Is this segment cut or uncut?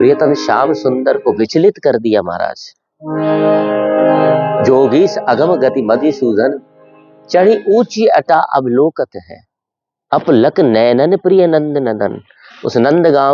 uncut